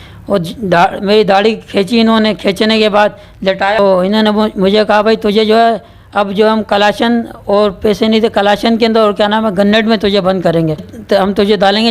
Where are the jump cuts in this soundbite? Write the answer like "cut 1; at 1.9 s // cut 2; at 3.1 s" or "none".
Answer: cut 1; at 3.8 s // cut 2; at 10.9 s